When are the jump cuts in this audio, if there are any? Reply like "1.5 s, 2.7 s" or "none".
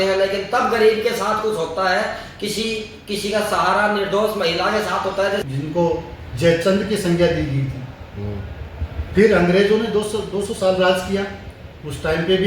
5.4 s